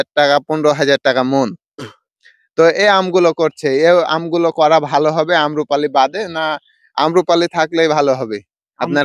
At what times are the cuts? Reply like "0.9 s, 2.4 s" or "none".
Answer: none